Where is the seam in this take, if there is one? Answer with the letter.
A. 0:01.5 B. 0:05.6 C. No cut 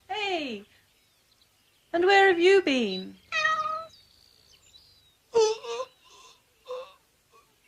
B